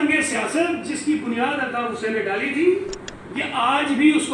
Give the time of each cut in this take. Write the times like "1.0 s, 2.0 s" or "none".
none